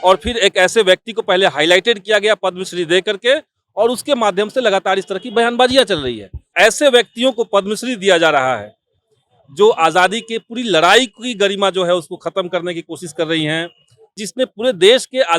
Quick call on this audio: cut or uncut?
cut